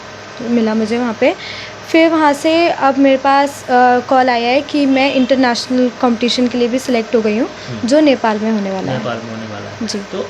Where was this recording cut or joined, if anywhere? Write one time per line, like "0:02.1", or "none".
none